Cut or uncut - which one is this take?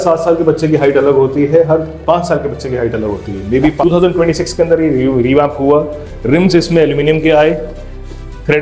cut